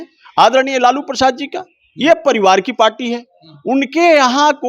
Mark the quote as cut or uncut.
uncut